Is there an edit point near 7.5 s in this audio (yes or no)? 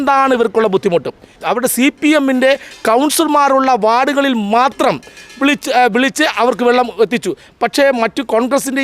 no